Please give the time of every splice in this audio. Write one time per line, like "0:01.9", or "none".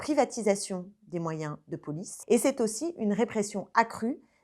0:02.1